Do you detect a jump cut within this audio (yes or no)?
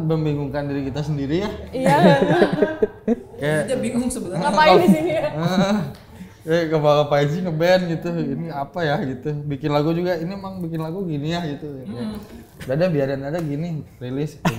no